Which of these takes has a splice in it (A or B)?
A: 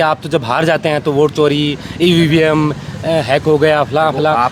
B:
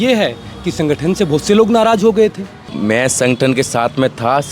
B